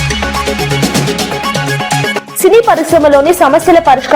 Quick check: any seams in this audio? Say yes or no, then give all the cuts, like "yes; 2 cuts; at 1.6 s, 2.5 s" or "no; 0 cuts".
yes; 1 cut; at 2.3 s